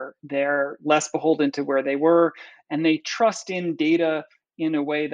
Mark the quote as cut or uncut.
uncut